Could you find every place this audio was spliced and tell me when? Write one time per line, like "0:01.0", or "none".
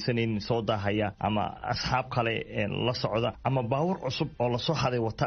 0:01.3
0:03.4
0:04.3